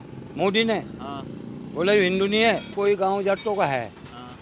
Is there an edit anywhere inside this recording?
yes; 1 cut; at 2.7 s

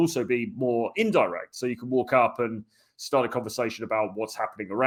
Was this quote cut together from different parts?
no; 0 cuts

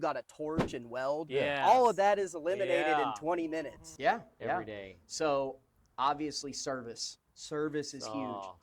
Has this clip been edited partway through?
yes; 1 cut; at 3.8 s

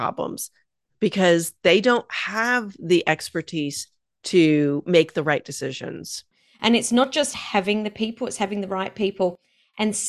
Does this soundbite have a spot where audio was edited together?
yes; 1 cut; at 6.3 s

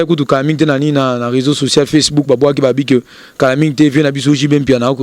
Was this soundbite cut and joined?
no; 0 cuts

